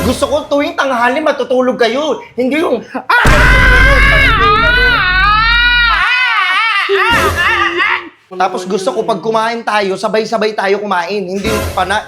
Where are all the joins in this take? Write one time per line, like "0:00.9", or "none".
0:08.2